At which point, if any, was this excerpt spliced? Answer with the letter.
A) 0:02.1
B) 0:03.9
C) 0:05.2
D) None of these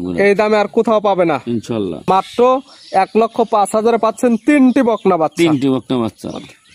A